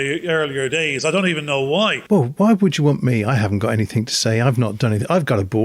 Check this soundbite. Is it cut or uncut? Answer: cut